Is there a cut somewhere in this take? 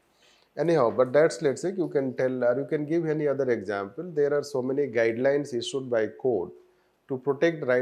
no; 0 cuts

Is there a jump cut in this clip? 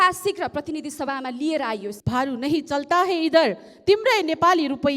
yes; 1 cut; at 1.9 s

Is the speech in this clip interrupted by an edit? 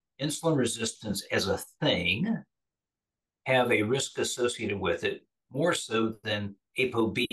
no; 0 cuts

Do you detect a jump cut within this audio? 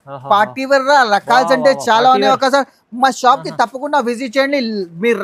no; 0 cuts

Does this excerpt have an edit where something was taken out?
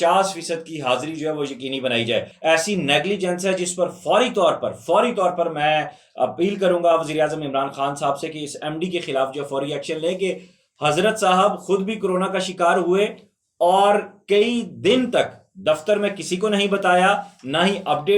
yes; 1 cut; at 2.3 s

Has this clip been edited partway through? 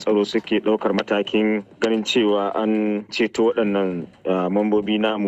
no; 0 cuts

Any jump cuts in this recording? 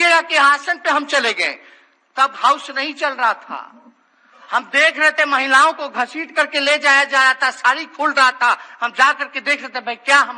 no; 0 cuts

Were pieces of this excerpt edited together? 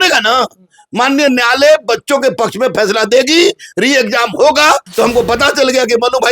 yes; 1 cut; at 4.9 s

